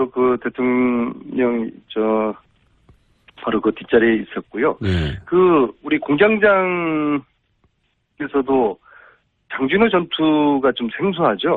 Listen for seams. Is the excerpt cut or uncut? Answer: uncut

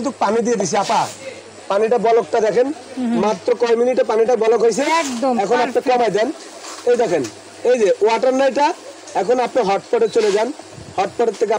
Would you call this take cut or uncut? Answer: uncut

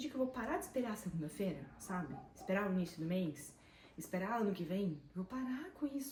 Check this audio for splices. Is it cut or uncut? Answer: uncut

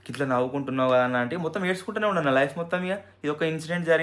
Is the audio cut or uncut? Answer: uncut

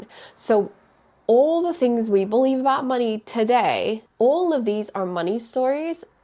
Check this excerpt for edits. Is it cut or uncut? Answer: cut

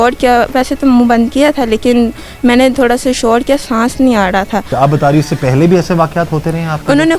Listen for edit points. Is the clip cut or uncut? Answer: cut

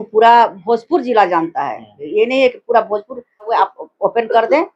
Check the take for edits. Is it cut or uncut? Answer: cut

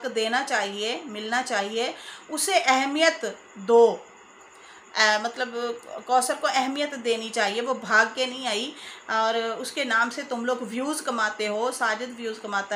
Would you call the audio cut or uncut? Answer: uncut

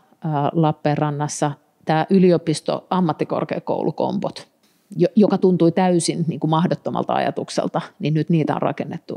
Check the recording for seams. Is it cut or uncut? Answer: uncut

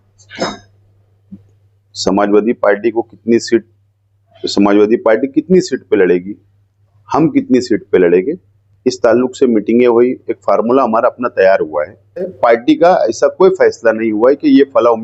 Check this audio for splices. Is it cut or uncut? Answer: cut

